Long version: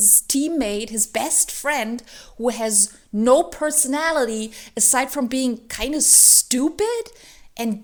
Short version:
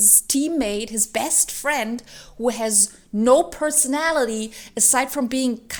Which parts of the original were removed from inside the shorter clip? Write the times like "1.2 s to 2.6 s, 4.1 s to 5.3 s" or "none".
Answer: none